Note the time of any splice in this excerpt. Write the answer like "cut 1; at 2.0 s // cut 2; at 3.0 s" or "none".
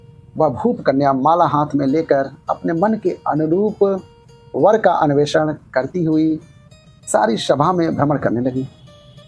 none